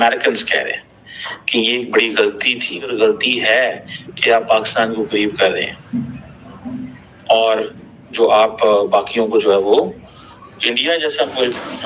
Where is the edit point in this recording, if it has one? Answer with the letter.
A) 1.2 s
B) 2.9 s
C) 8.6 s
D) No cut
B